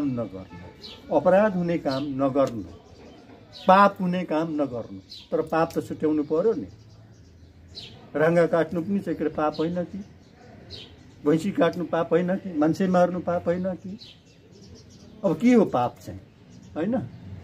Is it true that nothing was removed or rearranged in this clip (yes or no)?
yes